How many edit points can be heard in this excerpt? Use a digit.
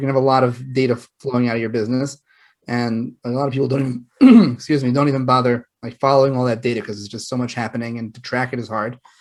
0